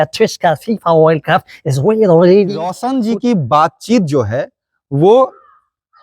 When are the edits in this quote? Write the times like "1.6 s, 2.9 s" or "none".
2.8 s